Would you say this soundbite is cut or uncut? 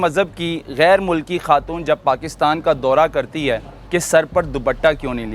cut